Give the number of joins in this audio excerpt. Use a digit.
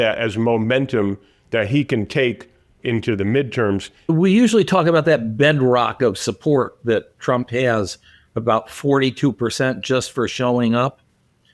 2